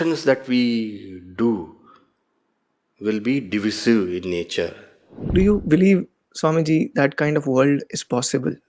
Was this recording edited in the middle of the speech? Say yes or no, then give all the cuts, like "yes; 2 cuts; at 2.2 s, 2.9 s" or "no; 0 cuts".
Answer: yes; 1 cut; at 5.3 s